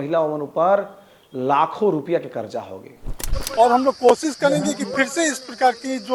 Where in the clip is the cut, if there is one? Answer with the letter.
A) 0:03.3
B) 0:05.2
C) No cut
A